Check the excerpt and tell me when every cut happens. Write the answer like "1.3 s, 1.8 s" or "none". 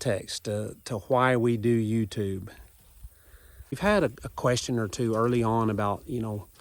3.8 s